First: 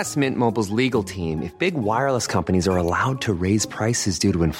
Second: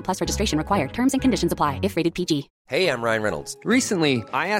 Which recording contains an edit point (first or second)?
second